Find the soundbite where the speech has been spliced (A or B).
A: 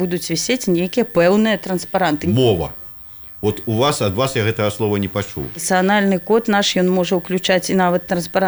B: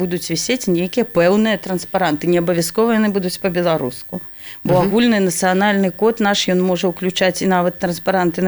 A